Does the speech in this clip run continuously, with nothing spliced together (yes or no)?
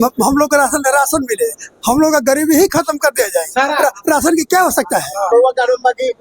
no